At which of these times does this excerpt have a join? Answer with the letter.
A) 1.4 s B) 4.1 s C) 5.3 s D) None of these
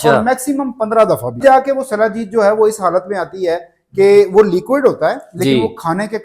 A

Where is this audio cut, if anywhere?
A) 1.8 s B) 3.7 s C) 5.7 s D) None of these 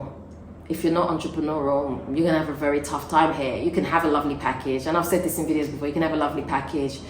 D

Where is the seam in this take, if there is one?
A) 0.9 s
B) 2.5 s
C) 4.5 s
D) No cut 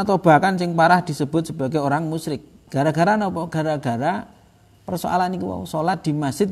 B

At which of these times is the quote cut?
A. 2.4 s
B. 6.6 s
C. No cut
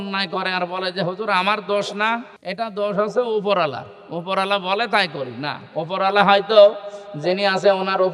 A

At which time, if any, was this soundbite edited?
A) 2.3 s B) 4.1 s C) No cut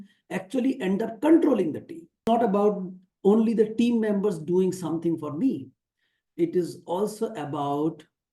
A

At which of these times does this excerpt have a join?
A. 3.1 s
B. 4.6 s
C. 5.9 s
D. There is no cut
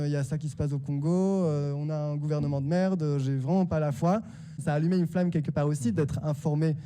B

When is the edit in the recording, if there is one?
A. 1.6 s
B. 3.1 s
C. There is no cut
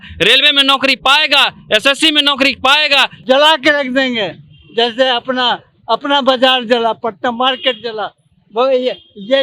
B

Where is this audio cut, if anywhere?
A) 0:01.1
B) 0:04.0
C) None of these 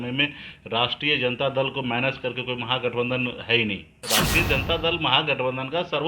B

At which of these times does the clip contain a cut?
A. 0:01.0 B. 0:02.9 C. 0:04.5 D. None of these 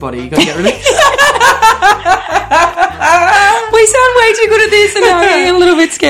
D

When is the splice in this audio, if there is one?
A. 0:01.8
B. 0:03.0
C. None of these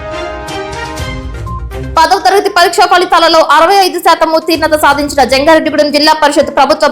A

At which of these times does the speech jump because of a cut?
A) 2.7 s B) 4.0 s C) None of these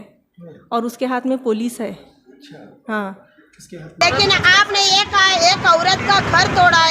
B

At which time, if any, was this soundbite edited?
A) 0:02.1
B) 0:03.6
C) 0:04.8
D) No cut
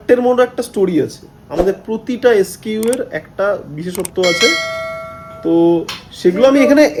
D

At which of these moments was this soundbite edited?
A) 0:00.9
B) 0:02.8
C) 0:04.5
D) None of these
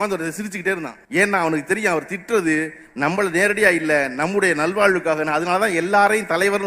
A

